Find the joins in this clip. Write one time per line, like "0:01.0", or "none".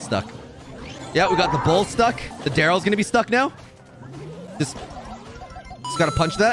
0:02.3

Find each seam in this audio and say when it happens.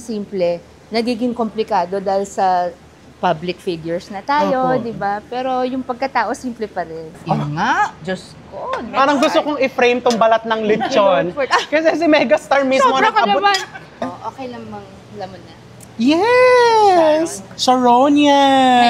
0:07.2
0:08.9
0:14.0

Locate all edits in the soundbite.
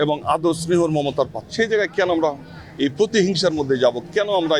0:01.4

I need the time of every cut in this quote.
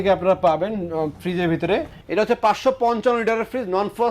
0:02.0

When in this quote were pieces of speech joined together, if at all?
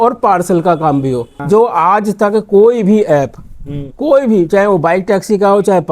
0:01.3

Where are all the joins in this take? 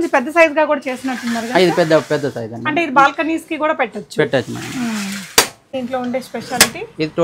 0:05.7

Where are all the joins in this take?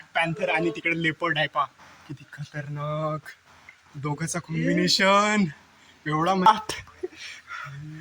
0:06.5

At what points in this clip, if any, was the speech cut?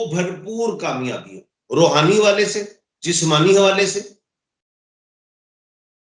none

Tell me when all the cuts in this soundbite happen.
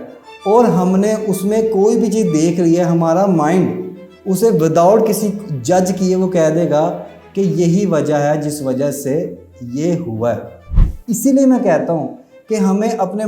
0:10.7

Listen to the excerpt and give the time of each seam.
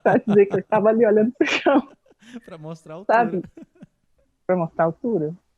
none

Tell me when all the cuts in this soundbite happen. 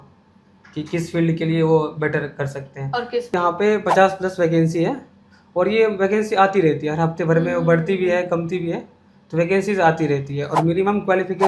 0:03.3

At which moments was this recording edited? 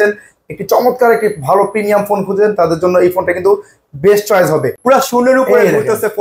0:04.8

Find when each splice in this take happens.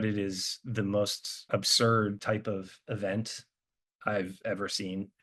0:01.3
0:02.2

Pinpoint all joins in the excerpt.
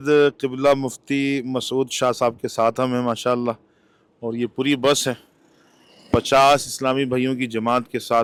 none

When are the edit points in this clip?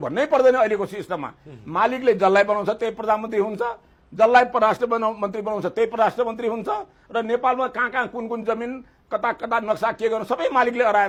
none

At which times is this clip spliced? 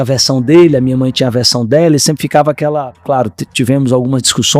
0:03.0

